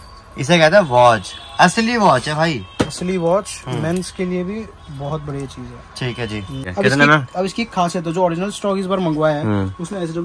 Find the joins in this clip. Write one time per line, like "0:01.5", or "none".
0:06.7

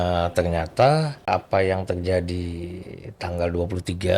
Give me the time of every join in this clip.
0:01.3

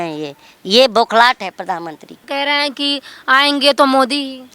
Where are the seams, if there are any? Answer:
0:02.2

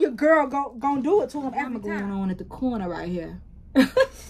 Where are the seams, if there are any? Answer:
0:01.8

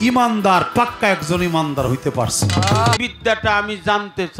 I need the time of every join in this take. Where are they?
0:03.0

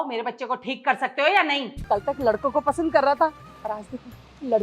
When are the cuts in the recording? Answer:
0:01.7

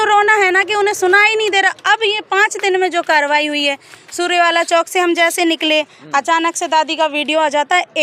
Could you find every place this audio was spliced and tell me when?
none

